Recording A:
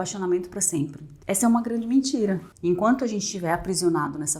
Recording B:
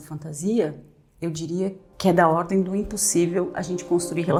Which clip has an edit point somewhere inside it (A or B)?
A